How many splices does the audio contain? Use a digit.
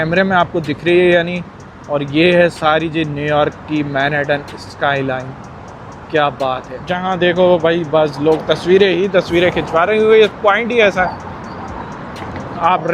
1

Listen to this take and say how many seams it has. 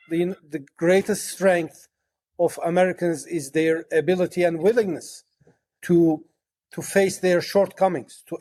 0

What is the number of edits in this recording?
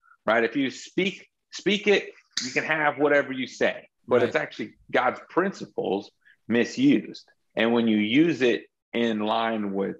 2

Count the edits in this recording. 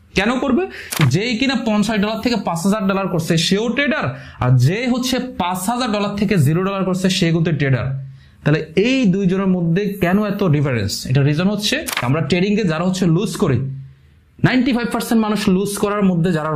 2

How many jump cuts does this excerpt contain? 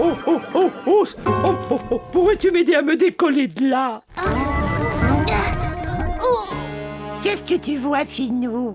1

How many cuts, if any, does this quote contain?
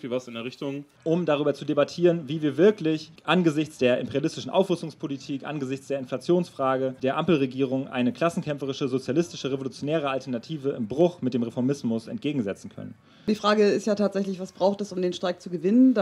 4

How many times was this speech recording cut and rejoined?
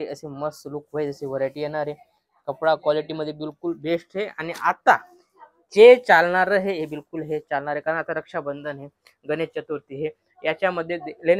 0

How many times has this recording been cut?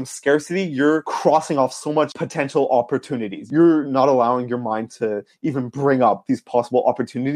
3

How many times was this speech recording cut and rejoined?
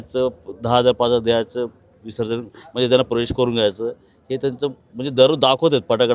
0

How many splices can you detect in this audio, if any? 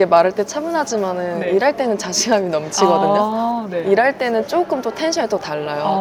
0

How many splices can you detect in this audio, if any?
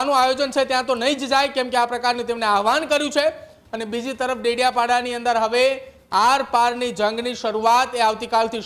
0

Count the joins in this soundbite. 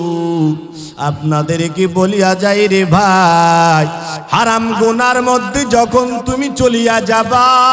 1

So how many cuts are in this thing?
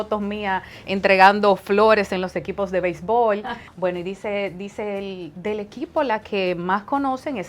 1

